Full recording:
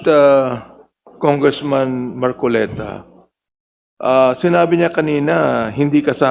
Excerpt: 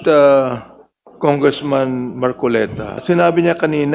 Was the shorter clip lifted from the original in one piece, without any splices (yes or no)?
no